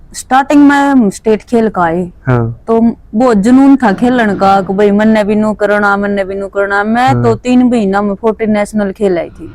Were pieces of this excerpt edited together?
no; 0 cuts

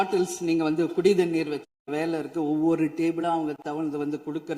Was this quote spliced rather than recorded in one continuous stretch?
yes; 1 cut; at 1.6 s

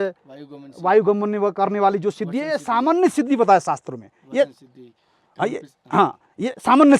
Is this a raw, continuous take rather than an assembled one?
yes; 0 cuts

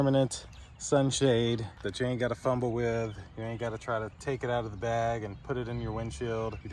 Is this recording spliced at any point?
no; 0 cuts

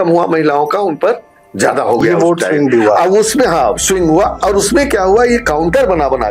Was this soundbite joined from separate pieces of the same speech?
no; 0 cuts

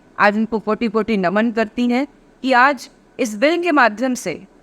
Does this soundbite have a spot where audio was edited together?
no; 0 cuts

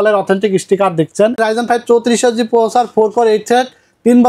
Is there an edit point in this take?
yes; 1 cut; at 1.4 s

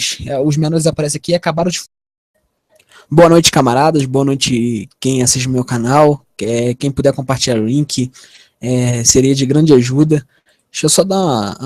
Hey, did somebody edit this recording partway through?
no; 0 cuts

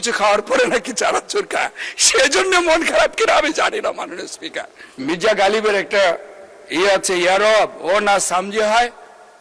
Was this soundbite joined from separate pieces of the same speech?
yes; 1 cut; at 5.0 s

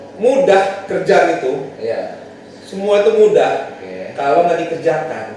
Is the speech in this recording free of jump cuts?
yes; 0 cuts

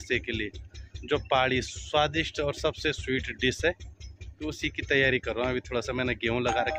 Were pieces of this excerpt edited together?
no; 0 cuts

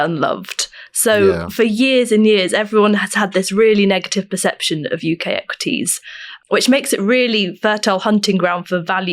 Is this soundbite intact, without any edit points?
no; 1 cut; at 6.4 s

